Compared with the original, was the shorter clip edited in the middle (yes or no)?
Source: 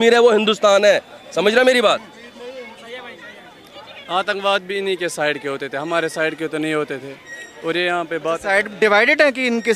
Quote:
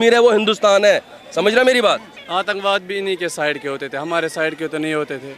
yes